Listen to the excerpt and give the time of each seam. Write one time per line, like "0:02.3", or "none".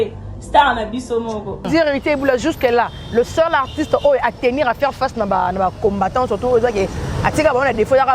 0:01.7